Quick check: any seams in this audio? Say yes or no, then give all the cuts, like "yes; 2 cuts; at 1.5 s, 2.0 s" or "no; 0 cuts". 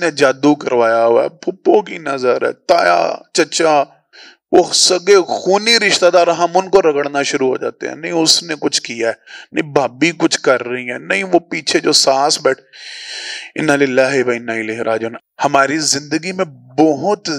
yes; 1 cut; at 15.1 s